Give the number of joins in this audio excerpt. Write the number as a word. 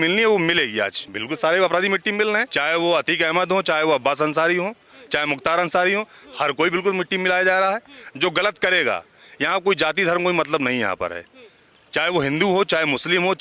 two